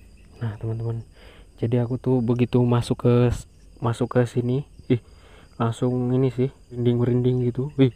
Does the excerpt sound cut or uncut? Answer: cut